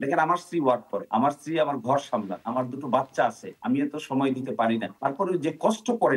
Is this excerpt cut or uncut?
cut